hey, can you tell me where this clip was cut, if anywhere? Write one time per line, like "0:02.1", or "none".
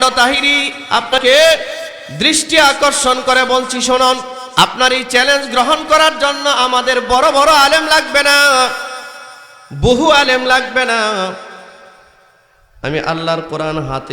0:01.2
0:04.4